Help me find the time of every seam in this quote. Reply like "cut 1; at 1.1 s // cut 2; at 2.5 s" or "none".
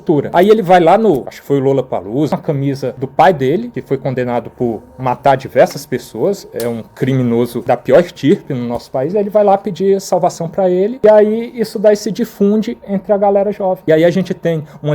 cut 1; at 2.3 s // cut 2; at 10.9 s